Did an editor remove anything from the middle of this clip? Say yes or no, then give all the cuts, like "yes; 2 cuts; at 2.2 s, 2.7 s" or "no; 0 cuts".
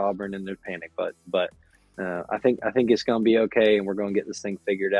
no; 0 cuts